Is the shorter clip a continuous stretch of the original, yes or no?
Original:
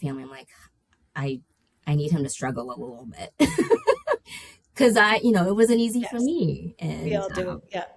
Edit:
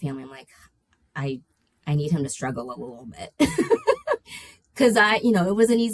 yes